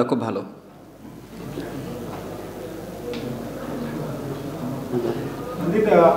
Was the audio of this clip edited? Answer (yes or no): no